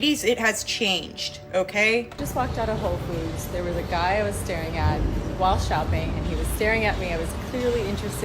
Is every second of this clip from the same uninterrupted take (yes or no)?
no